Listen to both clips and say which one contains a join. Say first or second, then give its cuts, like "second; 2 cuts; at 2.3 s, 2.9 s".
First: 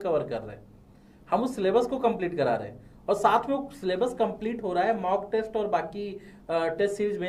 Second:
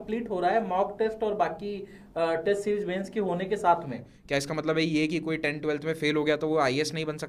second; 1 cut; at 4.1 s